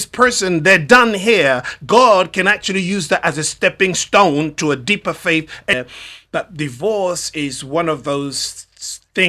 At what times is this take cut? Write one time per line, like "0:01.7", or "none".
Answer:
0:05.7